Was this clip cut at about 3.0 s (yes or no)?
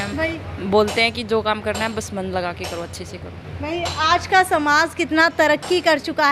no